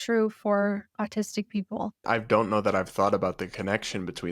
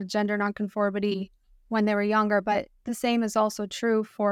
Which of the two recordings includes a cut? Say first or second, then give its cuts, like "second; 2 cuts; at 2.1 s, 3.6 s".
first; 1 cut; at 2.0 s